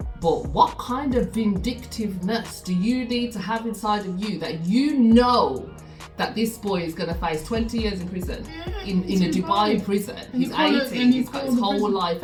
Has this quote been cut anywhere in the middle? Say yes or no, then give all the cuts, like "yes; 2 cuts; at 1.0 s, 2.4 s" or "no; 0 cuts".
no; 0 cuts